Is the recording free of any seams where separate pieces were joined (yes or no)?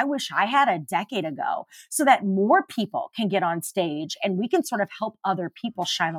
yes